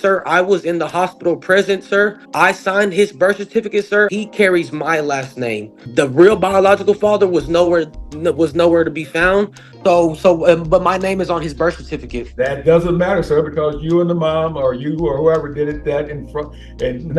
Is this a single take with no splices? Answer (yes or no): no